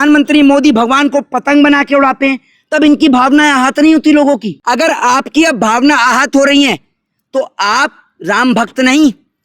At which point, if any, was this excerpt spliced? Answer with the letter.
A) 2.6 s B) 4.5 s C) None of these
B